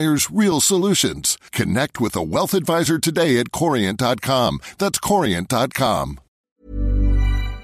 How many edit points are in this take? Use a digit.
1